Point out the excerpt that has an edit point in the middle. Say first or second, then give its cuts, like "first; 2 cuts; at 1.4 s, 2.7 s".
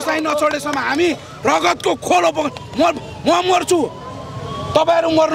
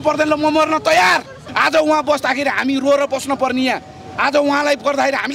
second; 1 cut; at 1.5 s